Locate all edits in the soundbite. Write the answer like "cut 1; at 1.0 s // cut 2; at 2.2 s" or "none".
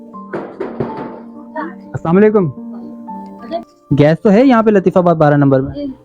cut 1; at 3.7 s